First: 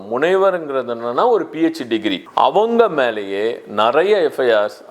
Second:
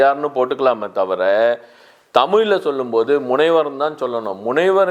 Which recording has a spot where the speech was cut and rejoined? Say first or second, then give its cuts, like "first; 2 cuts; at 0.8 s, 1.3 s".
first; 1 cut; at 2.2 s